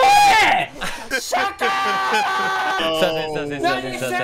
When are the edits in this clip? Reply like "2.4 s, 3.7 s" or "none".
1.1 s, 2.8 s